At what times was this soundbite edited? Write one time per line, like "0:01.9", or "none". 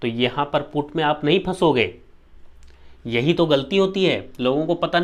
none